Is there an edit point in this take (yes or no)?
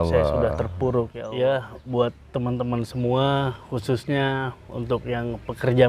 yes